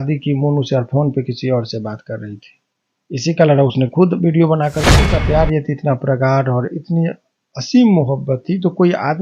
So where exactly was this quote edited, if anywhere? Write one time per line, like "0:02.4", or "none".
0:05.0